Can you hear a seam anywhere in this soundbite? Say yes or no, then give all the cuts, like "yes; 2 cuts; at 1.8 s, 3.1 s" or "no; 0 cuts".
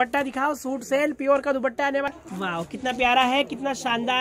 yes; 1 cut; at 2.1 s